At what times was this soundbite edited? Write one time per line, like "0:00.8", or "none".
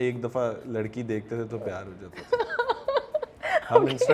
none